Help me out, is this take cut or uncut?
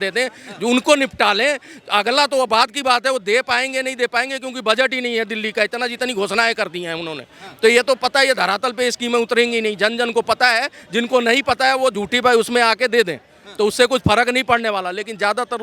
uncut